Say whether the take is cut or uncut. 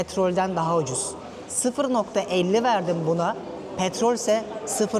uncut